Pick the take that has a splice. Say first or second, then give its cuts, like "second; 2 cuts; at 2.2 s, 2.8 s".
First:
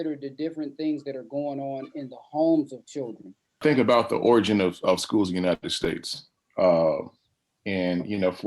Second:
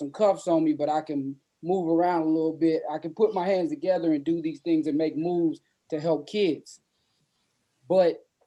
first; 1 cut; at 3.6 s